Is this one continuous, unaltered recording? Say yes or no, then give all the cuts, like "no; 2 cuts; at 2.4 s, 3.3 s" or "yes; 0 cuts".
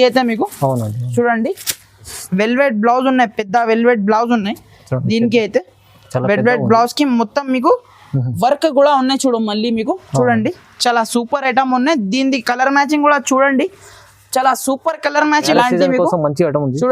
no; 2 cuts; at 2.1 s, 15.5 s